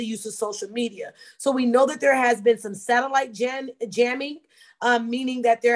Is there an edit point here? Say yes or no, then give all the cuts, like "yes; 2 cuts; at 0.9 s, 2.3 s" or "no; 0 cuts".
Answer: no; 0 cuts